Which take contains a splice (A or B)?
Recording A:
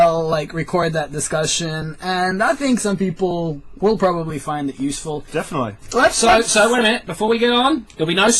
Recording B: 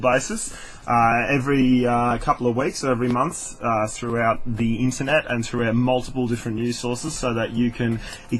B